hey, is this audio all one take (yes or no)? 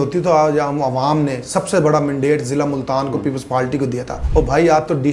no